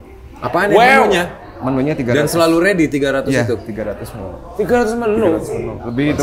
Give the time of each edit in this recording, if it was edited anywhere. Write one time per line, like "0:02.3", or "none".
none